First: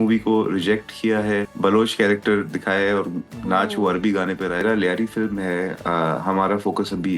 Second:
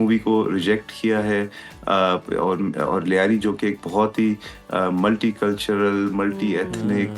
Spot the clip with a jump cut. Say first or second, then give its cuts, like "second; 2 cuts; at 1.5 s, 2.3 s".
first; 2 cuts; at 1.5 s, 4.6 s